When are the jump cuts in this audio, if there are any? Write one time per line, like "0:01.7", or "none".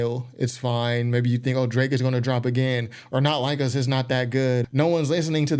0:04.7